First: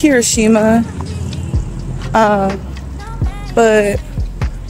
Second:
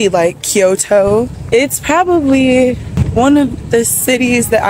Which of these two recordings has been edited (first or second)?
second